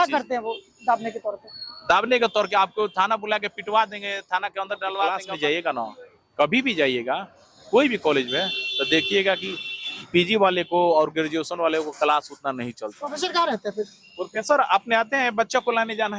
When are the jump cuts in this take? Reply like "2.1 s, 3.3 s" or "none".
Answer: 5.2 s, 13.0 s